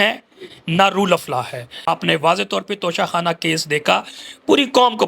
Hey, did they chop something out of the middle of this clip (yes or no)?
yes